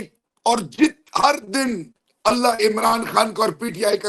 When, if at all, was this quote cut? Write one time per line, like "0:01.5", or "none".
none

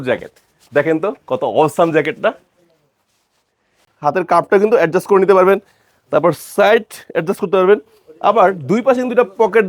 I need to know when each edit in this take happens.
0:03.8

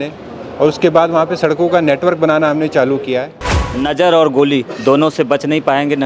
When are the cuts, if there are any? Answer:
0:03.7

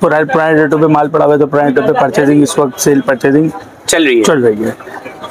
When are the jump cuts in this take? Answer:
none

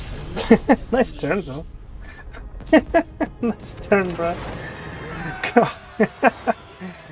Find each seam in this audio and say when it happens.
none

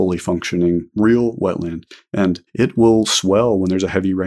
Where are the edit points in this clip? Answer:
0:00.9
0:02.5

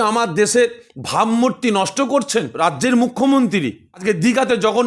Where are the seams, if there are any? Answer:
0:02.5
0:03.9

